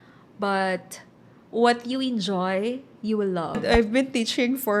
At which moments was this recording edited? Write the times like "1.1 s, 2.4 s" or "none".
3.5 s